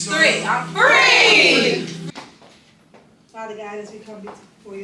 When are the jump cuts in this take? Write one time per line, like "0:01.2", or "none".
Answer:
0:02.0

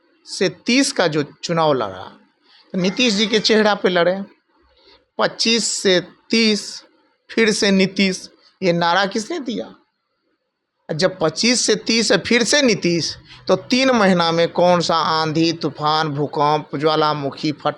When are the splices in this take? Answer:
none

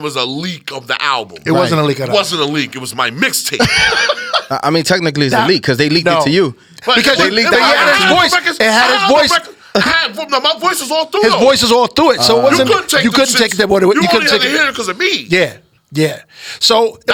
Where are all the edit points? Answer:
none

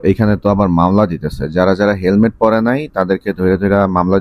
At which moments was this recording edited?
none

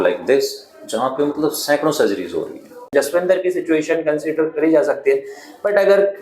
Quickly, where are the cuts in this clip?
0:02.9

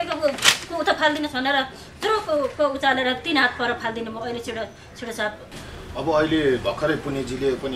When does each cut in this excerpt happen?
0:05.5

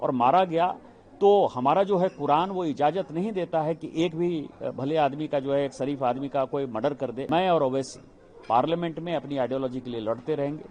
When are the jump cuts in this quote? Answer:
0:07.3

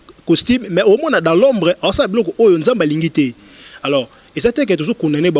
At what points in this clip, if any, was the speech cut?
none

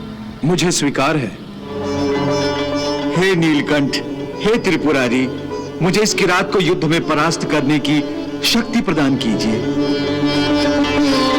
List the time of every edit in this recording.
0:01.8

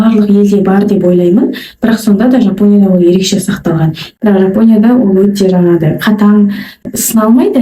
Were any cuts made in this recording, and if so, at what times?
0:04.1

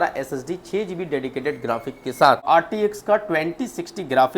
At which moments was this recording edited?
0:02.4

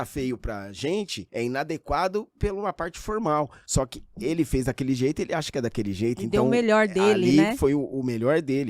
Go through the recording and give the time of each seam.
0:01.2
0:03.6

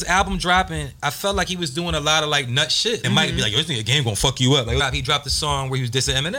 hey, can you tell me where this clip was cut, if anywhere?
0:03.0
0:04.8

